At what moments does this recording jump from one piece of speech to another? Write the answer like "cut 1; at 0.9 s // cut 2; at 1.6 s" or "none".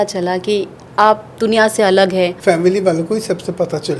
cut 1; at 2.4 s